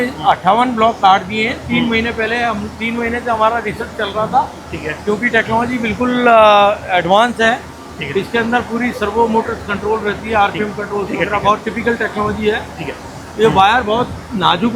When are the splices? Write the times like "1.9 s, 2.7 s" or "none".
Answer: none